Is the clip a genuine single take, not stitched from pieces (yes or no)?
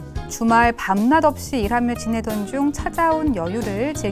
yes